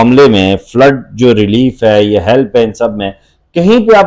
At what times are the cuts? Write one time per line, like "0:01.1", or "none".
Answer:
none